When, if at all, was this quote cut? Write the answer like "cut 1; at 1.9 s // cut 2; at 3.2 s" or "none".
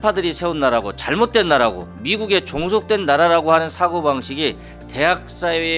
none